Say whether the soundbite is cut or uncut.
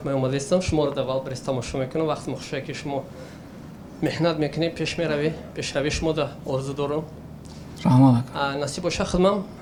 uncut